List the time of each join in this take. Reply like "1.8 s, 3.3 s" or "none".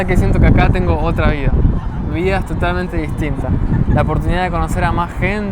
none